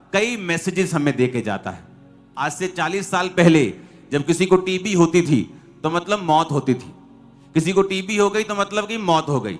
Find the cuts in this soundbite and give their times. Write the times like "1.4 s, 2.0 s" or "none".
none